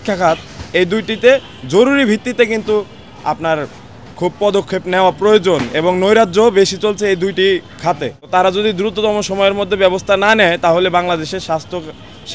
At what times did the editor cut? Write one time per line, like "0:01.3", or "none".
0:08.1